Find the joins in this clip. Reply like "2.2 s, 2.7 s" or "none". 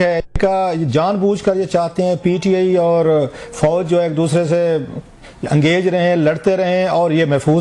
none